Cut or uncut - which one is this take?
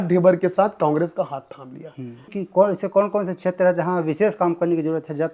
cut